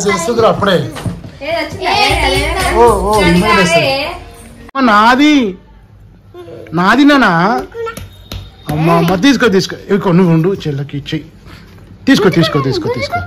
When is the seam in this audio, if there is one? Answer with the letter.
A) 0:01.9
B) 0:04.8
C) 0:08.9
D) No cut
B